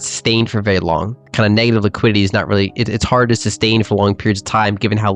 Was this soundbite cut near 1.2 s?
yes; 1 cut; at 1.2 s

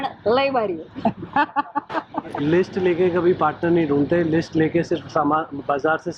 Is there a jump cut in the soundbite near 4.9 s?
no; 1 cut; at 2.4 s

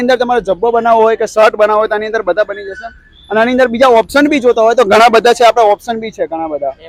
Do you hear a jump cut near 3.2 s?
no; 0 cuts

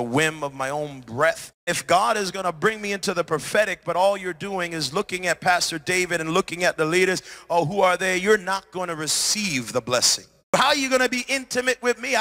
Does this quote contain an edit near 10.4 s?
yes; 2 cuts; at 1.7 s, 10.4 s

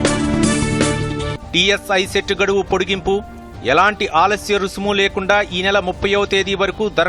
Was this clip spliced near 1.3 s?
yes; 1 cut; at 1.3 s

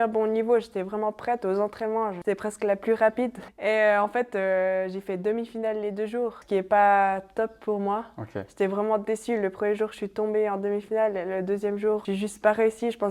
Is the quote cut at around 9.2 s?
no; 4 cuts; at 2.2 s, 3.4 s, 6.4 s, 12.0 s

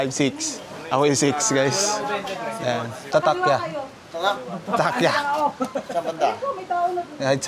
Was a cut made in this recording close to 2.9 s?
yes; 1 cut; at 2.9 s

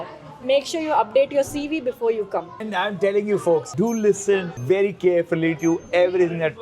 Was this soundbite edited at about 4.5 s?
yes; 3 cuts; at 2.7 s, 3.7 s, 4.5 s

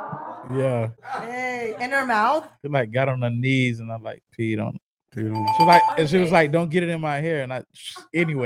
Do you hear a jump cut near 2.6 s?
yes; 1 cut; at 2.6 s

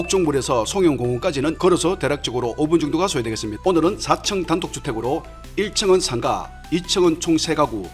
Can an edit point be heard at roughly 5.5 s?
no; 2 cuts; at 1.6 s, 3.5 s

